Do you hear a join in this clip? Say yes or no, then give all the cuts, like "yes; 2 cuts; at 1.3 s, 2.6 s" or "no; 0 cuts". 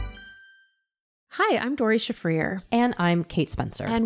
yes; 1 cut; at 1.2 s